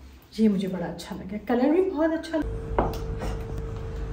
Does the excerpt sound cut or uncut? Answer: cut